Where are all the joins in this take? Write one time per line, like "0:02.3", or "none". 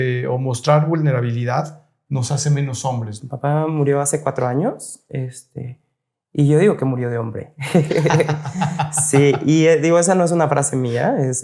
0:03.2